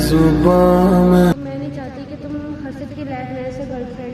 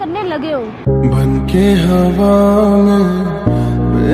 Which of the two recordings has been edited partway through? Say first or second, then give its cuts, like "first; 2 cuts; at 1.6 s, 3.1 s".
first; 1 cut; at 1.4 s